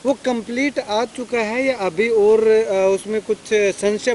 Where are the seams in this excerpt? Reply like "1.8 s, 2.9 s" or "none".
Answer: none